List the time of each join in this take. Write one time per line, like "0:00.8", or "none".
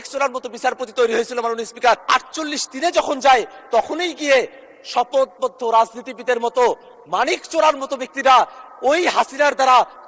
0:02.0